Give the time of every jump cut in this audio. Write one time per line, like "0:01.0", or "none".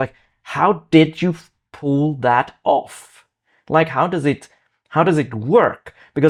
none